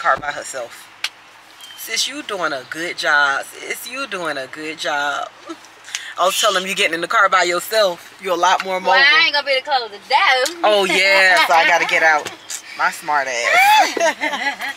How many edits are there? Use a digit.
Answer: 0